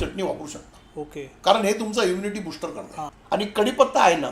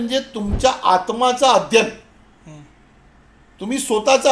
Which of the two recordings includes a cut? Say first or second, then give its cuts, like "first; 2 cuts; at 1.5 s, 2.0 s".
first; 1 cut; at 3.0 s